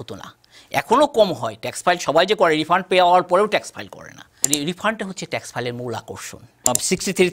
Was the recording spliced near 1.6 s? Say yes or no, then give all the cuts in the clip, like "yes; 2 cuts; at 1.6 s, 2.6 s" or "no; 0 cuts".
no; 2 cuts; at 4.3 s, 6.7 s